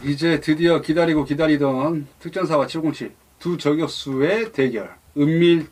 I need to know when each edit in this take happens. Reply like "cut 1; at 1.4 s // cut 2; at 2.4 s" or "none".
none